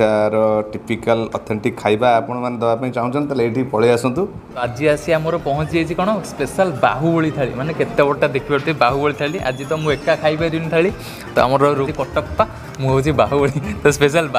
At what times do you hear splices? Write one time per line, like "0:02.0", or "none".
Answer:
0:04.6
0:11.9

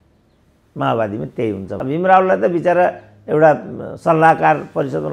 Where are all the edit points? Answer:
0:01.7

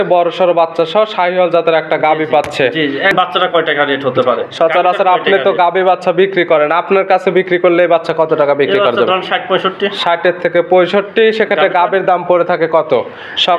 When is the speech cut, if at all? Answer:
0:03.1

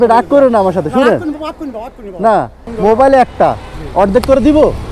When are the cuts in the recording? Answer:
0:02.6

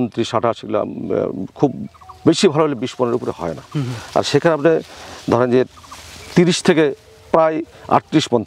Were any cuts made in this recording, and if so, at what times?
none

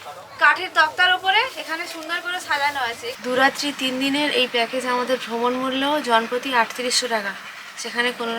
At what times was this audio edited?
0:03.1

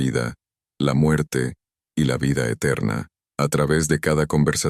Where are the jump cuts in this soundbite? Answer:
0:03.2

